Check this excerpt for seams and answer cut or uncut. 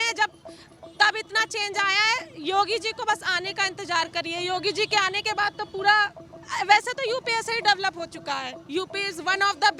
uncut